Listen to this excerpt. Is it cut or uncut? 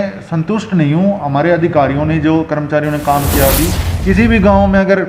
cut